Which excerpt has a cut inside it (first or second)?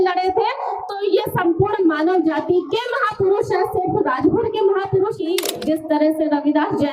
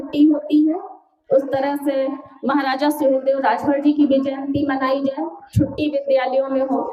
first